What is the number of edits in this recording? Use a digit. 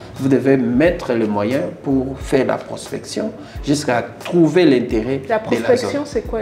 0